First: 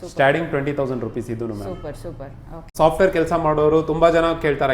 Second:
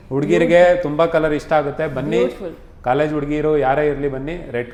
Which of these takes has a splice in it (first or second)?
first